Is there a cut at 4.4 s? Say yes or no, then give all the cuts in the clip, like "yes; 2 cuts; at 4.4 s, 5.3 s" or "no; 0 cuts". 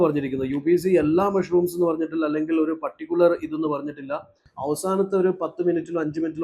yes; 1 cut; at 4.4 s